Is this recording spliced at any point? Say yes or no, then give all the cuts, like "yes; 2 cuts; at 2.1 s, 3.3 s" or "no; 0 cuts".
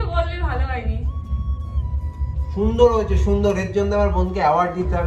no; 0 cuts